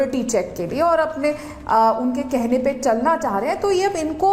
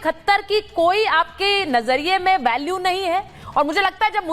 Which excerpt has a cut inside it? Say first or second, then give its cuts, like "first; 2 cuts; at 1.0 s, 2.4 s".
second; 1 cut; at 3.4 s